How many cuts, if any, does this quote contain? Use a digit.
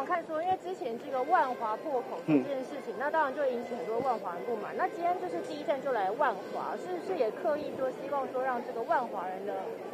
0